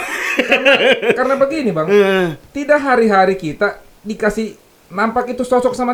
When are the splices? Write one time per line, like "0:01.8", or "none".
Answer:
none

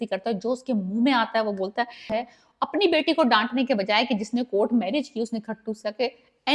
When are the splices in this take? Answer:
0:02.1

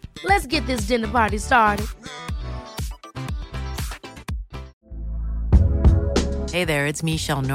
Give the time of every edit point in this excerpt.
0:04.7

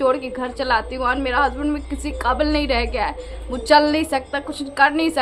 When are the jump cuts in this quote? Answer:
none

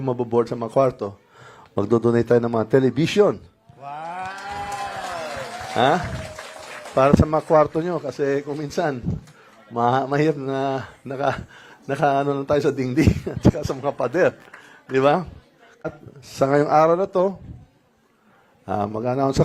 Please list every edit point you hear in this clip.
0:15.9

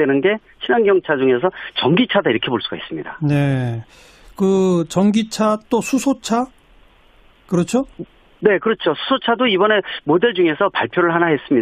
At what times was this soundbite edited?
none

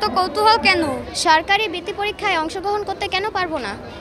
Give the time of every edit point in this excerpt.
0:01.1

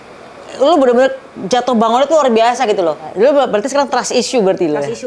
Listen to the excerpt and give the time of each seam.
0:03.1

